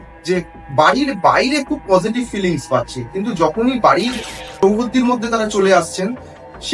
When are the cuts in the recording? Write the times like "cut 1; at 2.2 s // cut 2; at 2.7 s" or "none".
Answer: cut 1; at 4.6 s